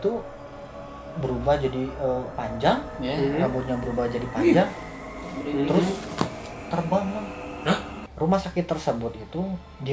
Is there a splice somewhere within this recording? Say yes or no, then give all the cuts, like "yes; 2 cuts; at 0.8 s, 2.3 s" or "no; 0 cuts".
yes; 1 cut; at 8.0 s